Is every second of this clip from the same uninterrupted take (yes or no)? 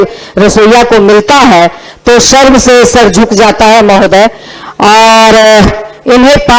yes